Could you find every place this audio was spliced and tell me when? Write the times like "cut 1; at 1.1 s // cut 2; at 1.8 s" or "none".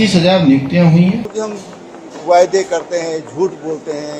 cut 1; at 1.3 s